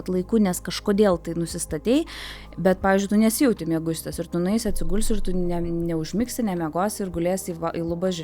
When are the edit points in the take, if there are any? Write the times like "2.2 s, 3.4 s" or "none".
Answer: none

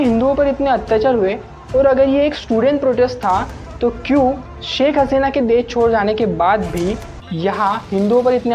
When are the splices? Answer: none

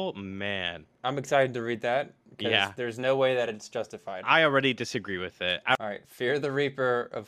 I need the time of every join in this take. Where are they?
0.9 s, 5.8 s

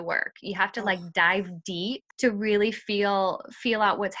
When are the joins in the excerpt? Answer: 2.1 s

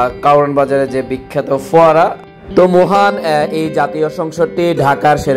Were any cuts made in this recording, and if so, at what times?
2.2 s

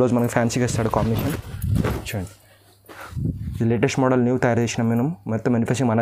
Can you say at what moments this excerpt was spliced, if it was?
none

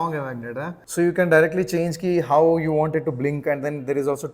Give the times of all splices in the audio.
none

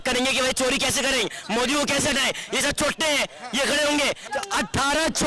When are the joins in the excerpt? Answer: 4.2 s

